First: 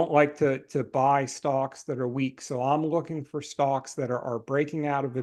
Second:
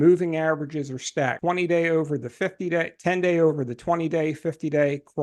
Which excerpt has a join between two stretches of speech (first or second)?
second